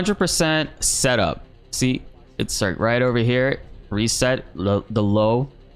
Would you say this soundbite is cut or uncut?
uncut